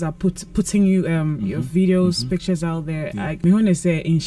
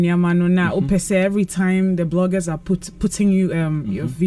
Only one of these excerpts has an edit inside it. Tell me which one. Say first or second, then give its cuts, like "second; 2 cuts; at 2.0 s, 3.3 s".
first; 1 cut; at 3.3 s